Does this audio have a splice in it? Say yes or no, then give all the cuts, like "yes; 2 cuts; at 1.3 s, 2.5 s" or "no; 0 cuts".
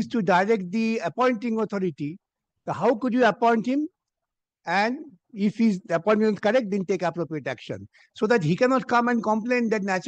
no; 0 cuts